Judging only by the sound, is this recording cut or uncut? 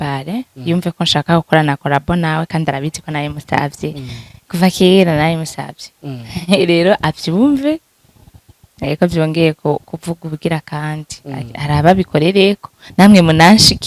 uncut